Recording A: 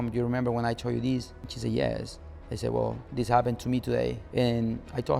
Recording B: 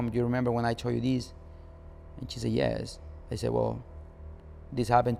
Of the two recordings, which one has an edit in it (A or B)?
A